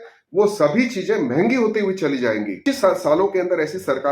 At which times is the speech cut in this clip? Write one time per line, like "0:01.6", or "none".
0:02.6